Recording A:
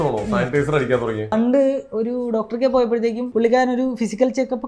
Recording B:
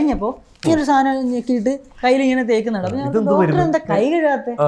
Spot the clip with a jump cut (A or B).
A